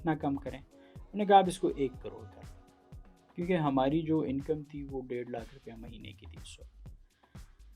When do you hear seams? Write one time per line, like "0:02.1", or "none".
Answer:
none